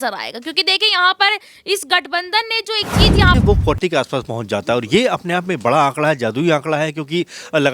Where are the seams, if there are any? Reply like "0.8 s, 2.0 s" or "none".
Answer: 3.4 s